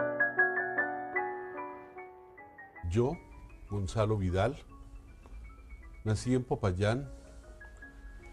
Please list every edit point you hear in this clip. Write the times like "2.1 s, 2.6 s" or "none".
none